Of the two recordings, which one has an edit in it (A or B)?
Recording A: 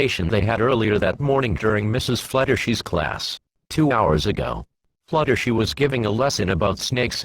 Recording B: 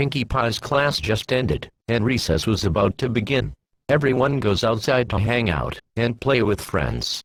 A